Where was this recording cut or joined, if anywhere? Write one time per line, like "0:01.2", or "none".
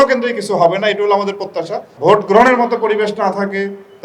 0:01.9

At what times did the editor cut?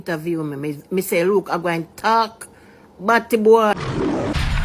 0:03.8

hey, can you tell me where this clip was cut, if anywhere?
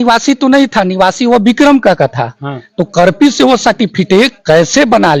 none

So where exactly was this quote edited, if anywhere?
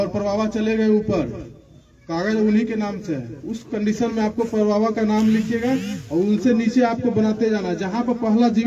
none

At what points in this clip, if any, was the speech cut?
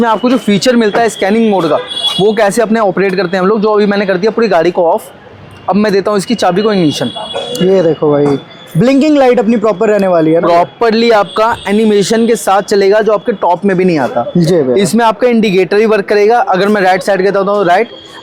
none

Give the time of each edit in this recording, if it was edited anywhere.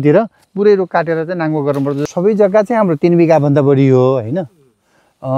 0:02.0

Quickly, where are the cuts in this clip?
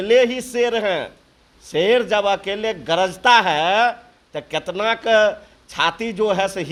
none

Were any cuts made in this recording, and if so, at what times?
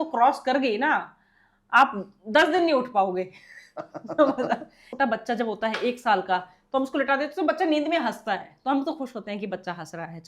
0:04.9

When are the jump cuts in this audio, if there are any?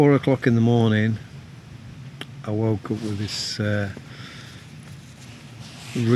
none

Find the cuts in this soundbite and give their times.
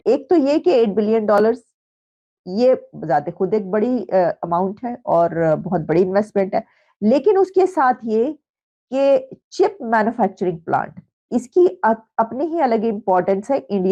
none

